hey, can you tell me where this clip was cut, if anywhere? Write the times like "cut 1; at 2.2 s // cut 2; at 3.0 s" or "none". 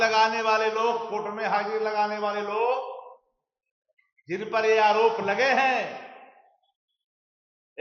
none